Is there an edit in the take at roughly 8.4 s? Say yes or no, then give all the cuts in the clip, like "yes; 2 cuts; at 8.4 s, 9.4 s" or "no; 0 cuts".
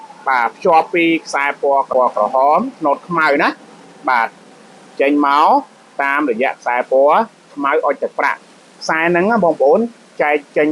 no; 1 cut; at 1.9 s